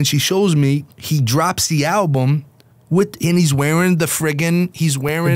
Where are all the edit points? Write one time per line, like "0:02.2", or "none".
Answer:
0:00.9